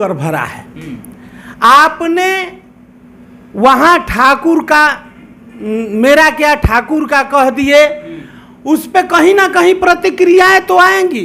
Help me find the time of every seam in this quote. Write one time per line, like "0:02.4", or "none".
none